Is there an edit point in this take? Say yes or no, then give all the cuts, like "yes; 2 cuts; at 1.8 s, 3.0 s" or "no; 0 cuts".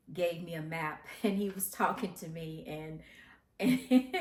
no; 0 cuts